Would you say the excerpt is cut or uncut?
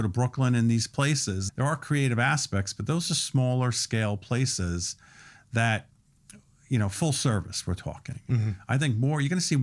cut